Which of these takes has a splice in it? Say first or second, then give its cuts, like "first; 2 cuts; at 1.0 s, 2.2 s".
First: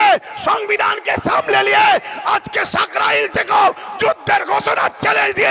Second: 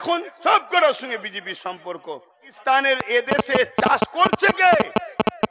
second; 1 cut; at 2.5 s